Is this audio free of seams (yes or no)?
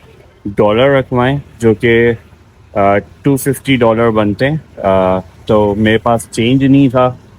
yes